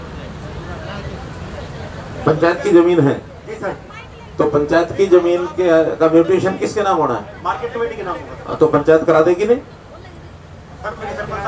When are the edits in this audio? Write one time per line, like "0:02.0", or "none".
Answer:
none